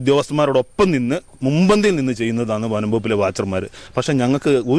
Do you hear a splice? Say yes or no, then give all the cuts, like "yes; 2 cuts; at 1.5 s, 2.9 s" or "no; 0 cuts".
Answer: yes; 1 cut; at 3.8 s